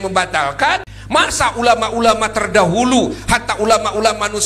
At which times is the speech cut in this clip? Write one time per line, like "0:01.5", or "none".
0:00.9